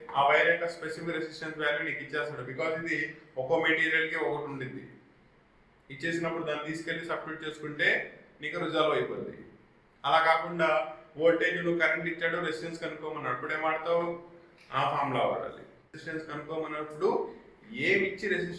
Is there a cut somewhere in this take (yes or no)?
no